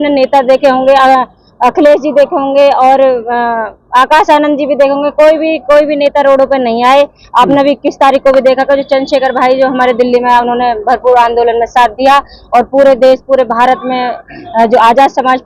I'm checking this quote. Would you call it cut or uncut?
uncut